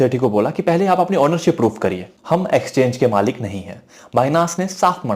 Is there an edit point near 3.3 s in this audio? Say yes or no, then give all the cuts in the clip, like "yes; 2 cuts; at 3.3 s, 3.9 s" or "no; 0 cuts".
no; 1 cut; at 2.1 s